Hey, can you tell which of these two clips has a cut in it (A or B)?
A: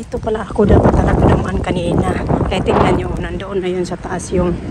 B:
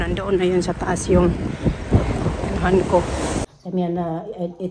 B